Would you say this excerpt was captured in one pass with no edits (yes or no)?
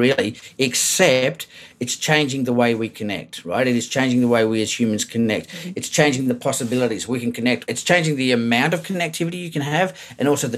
no